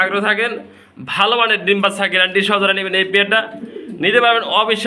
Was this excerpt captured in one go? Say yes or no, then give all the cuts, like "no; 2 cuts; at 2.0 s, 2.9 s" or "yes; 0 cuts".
yes; 0 cuts